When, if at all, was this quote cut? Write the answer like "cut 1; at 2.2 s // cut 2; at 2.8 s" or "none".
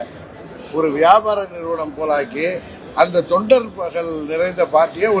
cut 1; at 2.8 s